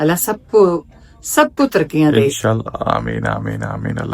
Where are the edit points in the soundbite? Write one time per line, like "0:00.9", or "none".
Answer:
none